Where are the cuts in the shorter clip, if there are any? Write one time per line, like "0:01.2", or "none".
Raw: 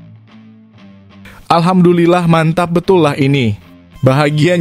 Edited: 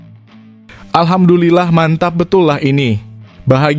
0:00.9

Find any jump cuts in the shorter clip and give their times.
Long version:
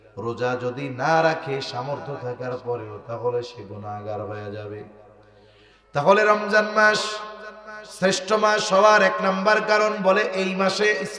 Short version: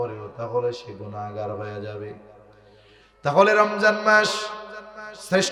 none

